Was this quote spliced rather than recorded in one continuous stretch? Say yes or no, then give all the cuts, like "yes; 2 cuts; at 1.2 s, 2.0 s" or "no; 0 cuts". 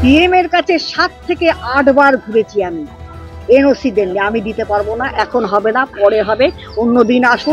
no; 0 cuts